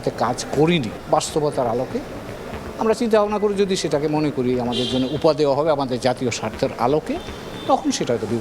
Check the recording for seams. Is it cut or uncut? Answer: cut